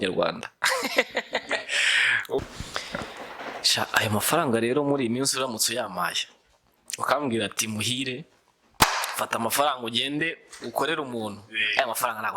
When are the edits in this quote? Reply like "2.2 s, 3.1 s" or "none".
2.4 s